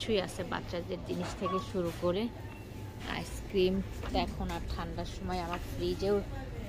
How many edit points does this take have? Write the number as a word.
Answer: zero